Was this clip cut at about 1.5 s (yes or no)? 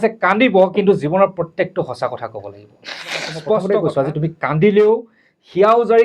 no